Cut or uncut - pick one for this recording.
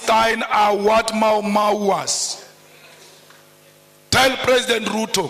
uncut